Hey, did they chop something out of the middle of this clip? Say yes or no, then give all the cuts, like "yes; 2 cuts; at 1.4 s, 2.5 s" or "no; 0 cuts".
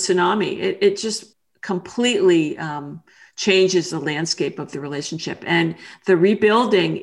yes; 1 cut; at 1.1 s